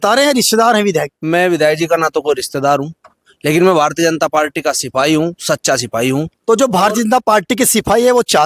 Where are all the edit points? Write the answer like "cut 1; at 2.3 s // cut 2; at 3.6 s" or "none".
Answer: cut 1; at 1.2 s